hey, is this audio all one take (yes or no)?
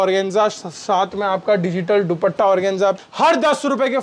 no